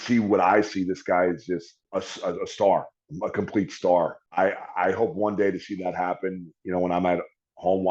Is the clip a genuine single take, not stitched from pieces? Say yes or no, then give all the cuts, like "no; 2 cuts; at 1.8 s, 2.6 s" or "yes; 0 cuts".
no; 2 cuts; at 1.8 s, 4.2 s